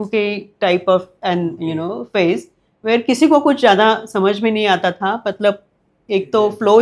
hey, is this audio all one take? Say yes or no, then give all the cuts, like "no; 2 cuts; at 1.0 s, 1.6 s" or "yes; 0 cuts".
yes; 0 cuts